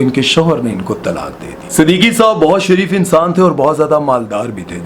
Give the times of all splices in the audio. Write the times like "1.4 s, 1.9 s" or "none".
1.5 s